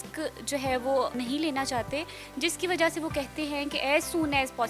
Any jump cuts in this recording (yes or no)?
no